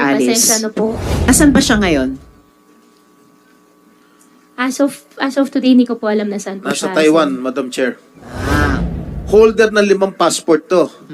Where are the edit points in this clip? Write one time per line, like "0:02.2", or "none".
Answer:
0:01.1
0:08.9